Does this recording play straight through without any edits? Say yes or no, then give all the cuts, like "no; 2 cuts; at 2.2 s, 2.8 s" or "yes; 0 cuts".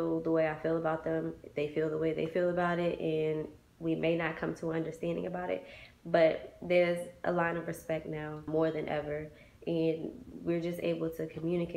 no; 1 cut; at 8.4 s